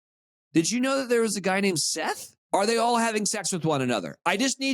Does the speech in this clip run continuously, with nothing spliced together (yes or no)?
no